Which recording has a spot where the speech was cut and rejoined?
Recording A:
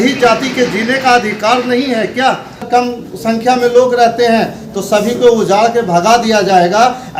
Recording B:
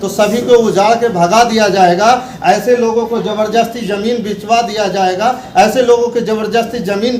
A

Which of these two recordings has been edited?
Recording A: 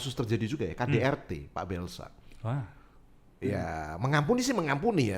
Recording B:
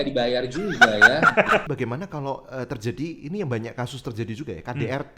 B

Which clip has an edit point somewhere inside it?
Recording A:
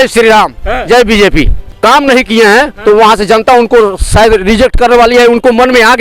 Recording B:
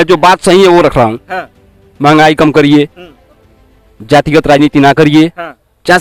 A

